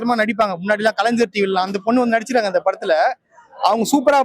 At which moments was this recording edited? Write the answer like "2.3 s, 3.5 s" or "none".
none

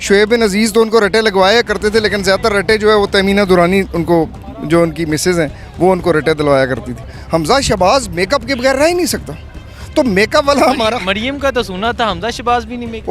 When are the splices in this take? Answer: 7.1 s

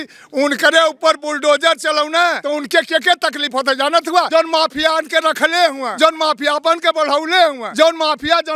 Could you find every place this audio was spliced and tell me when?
2.4 s, 4.3 s, 5.8 s, 7.6 s

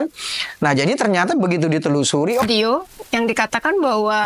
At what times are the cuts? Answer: 2.4 s

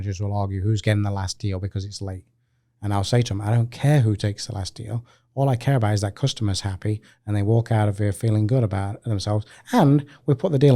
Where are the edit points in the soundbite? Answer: none

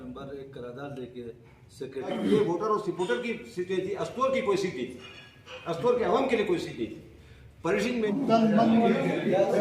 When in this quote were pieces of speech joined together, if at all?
2.1 s, 8.1 s

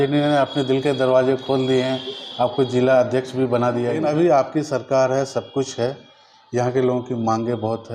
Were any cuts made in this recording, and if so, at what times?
4.0 s

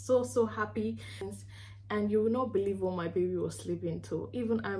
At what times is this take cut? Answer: 1.2 s

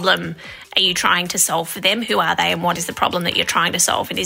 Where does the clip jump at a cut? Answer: 2.8 s

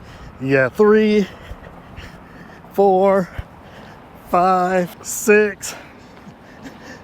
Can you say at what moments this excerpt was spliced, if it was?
5.0 s

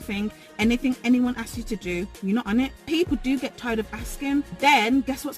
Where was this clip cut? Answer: 2.9 s, 4.5 s

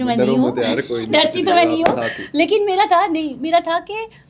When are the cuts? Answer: none

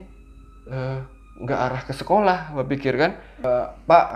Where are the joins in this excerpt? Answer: 3.3 s

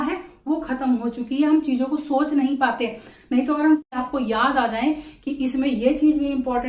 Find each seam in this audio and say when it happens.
3.9 s

